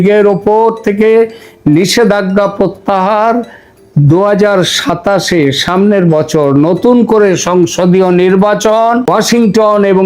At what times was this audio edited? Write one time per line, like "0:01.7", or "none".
0:09.1